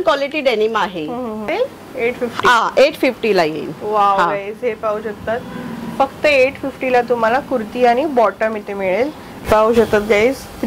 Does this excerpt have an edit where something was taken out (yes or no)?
yes